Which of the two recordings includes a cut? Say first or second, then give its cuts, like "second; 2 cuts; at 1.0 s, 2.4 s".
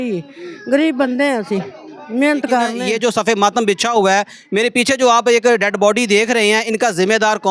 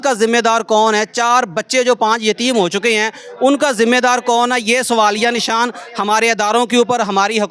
first; 1 cut; at 2.8 s